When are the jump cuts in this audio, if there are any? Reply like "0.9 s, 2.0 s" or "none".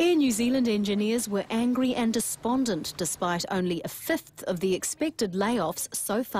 none